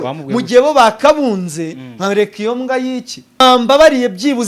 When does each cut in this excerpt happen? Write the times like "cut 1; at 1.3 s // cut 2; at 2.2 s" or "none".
cut 1; at 3.4 s